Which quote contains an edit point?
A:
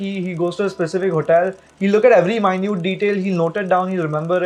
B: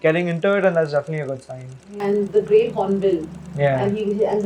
B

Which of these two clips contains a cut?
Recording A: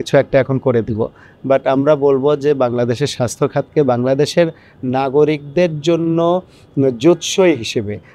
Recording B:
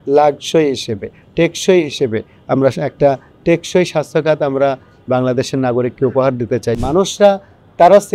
B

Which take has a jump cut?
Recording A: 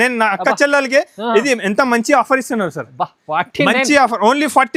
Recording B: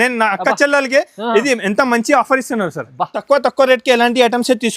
B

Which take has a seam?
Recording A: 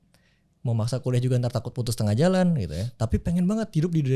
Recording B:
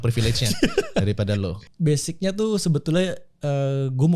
B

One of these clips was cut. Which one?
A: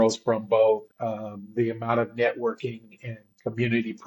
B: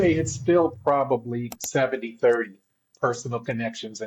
A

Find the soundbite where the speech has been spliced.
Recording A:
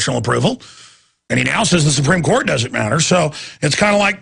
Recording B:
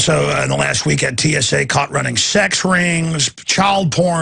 B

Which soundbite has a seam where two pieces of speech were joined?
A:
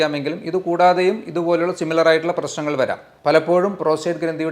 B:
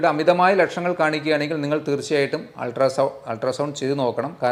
A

